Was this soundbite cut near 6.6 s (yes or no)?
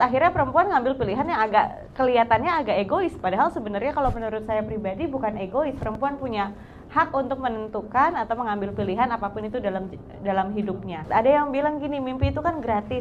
no